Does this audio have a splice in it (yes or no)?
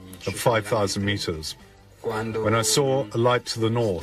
no